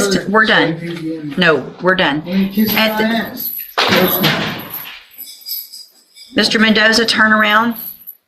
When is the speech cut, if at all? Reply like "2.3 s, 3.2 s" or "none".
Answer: none